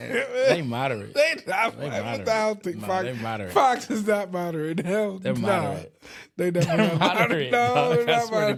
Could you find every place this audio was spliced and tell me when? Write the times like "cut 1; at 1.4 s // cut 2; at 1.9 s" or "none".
none